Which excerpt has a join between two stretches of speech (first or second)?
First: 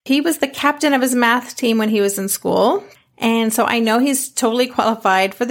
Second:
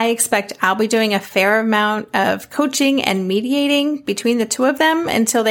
first